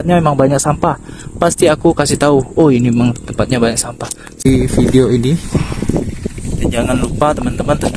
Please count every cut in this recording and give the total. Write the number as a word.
one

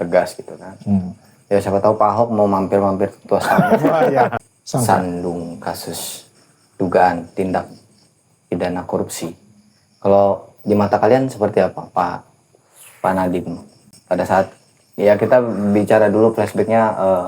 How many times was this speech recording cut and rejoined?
one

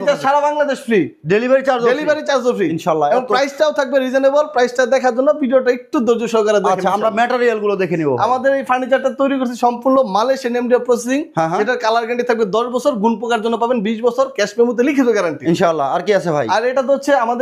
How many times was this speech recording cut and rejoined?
zero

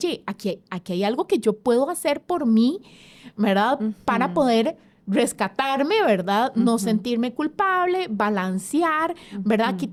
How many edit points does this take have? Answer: zero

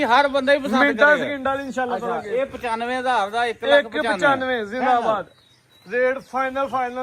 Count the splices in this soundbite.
zero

